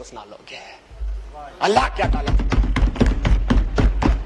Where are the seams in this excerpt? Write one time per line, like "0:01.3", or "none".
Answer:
none